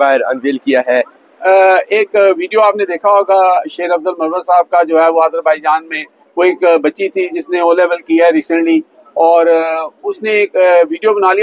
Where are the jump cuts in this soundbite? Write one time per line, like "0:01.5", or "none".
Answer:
0:01.2